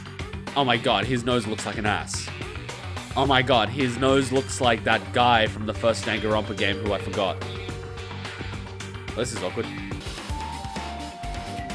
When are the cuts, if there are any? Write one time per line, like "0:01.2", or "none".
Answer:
0:10.0